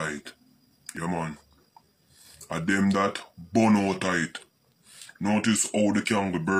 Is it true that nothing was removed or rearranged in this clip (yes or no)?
yes